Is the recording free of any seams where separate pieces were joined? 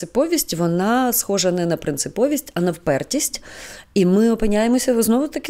yes; 0 cuts

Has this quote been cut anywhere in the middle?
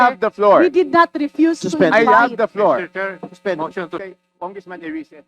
yes; 1 cut; at 4.0 s

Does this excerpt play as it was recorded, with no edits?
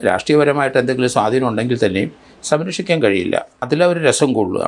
no; 1 cut; at 3.6 s

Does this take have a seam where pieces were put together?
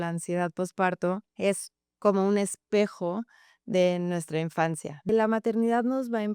yes; 2 cuts; at 1.3 s, 5.1 s

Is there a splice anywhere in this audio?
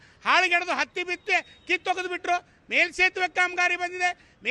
no; 0 cuts

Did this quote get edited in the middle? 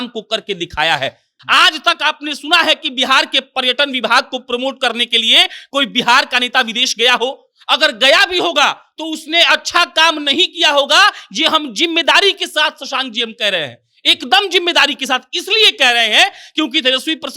yes; 1 cut; at 1.3 s

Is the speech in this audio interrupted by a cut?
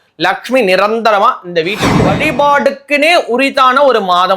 yes; 1 cut; at 2.0 s

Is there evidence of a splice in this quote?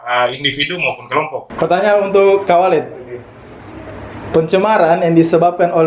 yes; 1 cut; at 1.4 s

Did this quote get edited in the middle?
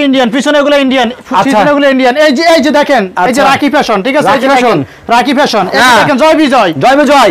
no; 0 cuts

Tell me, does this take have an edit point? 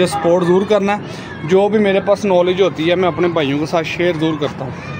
no; 0 cuts

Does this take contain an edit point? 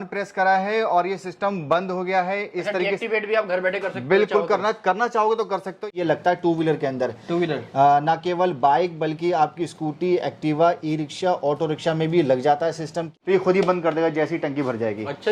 yes; 2 cuts; at 5.9 s, 13.1 s

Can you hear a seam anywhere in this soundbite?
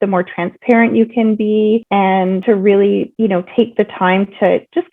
yes; 2 cuts; at 2.2 s, 3.1 s

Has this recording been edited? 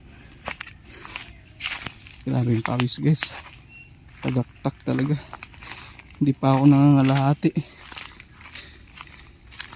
no; 0 cuts

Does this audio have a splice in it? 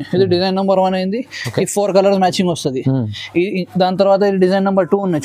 no; 0 cuts

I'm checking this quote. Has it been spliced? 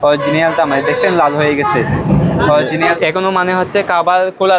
yes; 1 cut; at 3.0 s

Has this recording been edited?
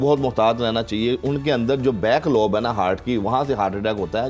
no; 0 cuts

